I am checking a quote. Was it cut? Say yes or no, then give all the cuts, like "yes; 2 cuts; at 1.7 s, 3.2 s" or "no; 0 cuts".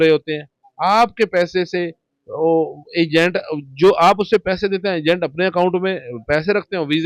no; 0 cuts